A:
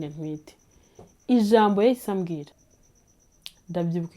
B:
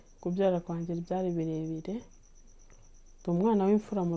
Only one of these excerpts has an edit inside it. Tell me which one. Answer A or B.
A